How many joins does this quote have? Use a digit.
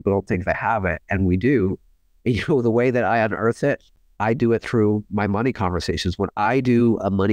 1